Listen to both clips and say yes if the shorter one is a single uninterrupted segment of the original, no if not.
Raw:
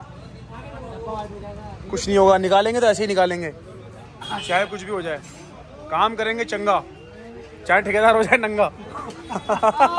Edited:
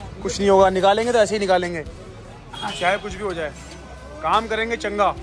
yes